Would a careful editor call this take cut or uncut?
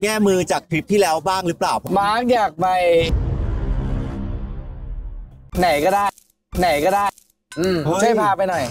cut